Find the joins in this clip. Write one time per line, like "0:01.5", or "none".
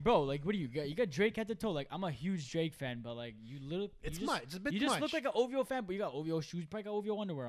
none